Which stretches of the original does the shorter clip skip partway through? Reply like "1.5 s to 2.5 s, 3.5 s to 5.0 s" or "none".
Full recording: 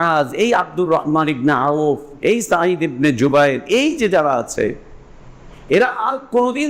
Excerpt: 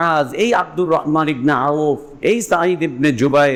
none